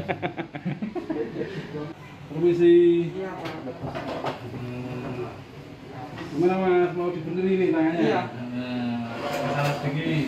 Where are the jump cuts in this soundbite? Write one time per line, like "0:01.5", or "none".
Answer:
0:01.9